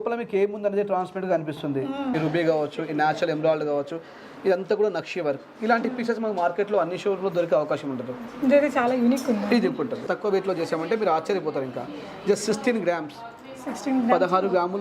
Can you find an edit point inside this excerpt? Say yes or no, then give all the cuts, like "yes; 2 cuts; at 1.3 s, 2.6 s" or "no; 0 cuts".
yes; 2 cuts; at 2.1 s, 10.1 s